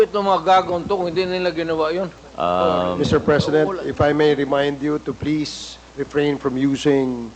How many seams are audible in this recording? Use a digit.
1